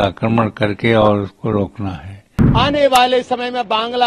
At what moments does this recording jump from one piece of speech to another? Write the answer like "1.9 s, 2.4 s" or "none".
2.4 s